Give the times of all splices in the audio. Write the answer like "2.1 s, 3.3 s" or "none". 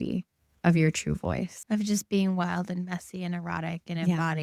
1.6 s